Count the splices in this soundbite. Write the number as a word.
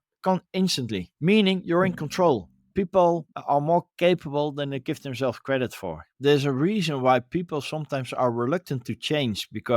two